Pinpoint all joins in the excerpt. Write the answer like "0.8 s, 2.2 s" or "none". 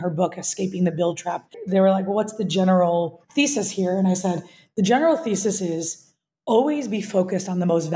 1.6 s, 3.2 s